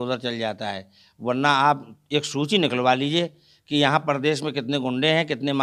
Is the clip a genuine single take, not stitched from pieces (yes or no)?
yes